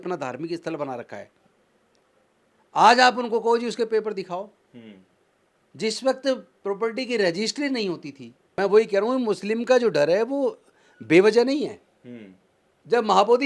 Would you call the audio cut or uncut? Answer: cut